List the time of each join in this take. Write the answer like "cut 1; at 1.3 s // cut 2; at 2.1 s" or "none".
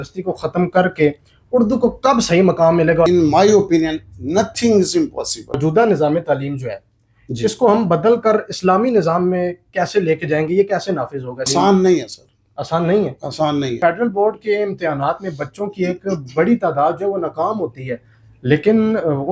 cut 1; at 3.1 s // cut 2; at 5.6 s // cut 3; at 11.5 s // cut 4; at 13.8 s